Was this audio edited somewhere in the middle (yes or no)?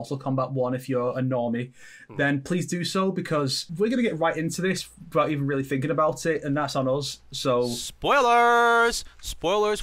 yes